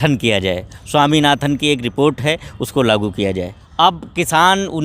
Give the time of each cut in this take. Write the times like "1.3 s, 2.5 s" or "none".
3.6 s